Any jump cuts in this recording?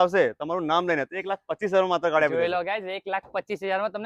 no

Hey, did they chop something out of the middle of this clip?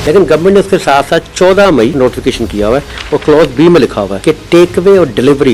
yes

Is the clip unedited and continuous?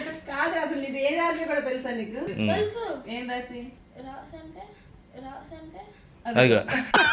no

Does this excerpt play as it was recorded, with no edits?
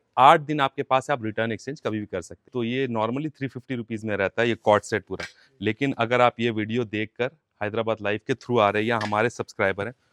no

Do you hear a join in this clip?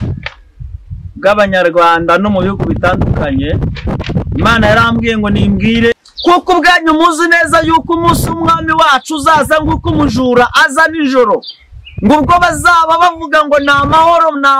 yes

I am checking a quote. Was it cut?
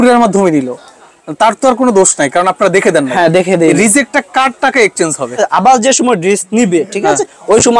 yes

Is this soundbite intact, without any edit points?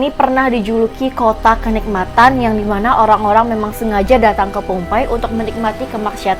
yes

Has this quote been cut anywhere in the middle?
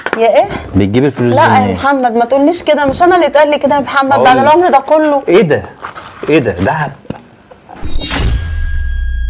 yes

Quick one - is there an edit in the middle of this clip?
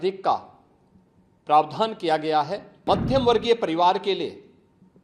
yes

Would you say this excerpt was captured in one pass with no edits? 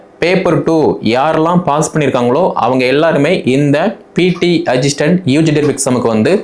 yes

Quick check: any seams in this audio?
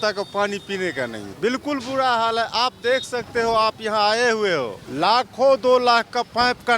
yes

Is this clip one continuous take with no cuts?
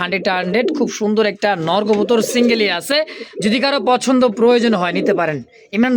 yes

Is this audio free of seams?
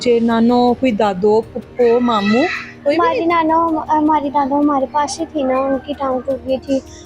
yes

